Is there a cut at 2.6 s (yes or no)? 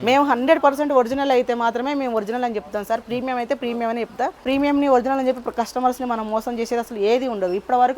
no